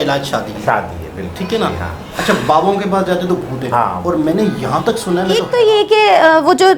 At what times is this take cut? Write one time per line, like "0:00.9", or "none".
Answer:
0:05.5